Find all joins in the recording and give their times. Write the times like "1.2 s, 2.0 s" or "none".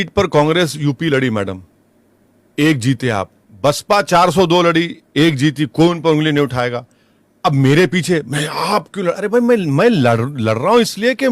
3.4 s